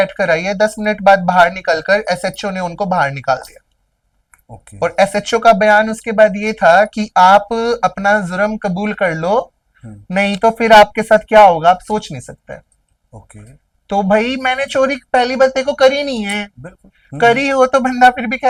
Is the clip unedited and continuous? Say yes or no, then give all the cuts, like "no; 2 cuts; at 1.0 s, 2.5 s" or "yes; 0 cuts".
yes; 0 cuts